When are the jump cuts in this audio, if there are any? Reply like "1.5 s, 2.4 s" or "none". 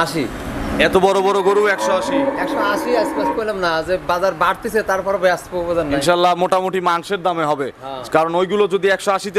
none